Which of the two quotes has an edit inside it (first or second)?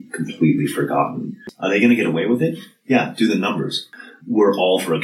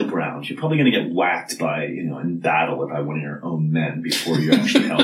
first